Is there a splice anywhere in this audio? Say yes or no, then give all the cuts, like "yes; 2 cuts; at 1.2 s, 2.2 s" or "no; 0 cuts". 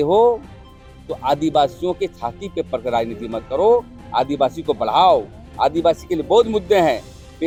no; 0 cuts